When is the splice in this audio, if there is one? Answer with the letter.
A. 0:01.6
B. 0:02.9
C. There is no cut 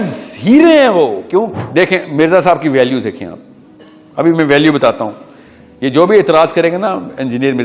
A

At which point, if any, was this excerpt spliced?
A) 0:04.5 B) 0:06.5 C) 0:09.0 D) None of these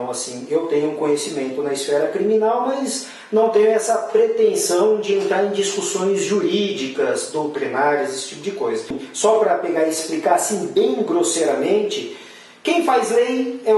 C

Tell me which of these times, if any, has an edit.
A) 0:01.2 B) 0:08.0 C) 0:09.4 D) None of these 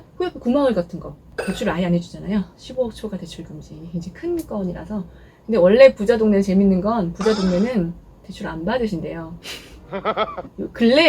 A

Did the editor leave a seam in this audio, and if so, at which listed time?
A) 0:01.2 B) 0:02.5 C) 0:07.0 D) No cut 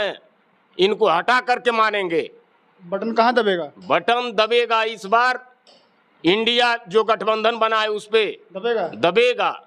D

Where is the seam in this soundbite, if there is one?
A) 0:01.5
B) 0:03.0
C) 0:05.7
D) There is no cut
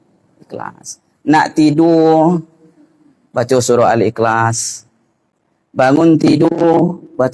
D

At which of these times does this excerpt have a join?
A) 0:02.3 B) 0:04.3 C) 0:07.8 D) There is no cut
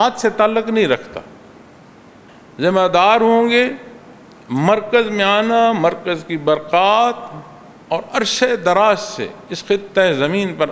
A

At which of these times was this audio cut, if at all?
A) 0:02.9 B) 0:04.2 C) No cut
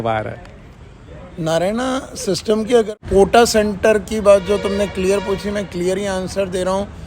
A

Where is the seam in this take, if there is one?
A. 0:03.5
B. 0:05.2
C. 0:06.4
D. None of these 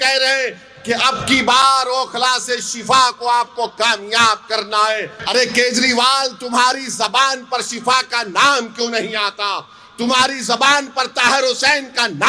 B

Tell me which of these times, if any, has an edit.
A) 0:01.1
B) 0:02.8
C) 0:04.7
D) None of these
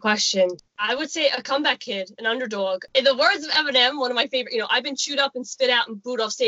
B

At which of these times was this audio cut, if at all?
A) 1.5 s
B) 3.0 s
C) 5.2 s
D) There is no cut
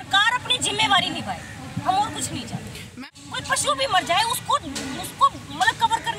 B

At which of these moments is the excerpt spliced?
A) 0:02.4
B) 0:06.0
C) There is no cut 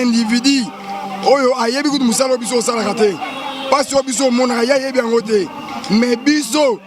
C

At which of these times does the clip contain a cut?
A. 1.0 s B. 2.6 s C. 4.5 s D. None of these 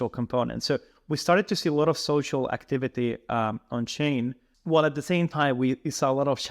C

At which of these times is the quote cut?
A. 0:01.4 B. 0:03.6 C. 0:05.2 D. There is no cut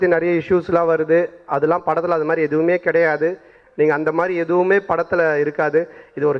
D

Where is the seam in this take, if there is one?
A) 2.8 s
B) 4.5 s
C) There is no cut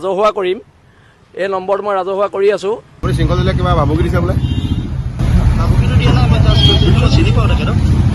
A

